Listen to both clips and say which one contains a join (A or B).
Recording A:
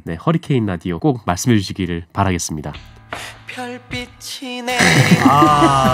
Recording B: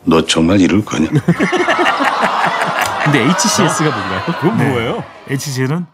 A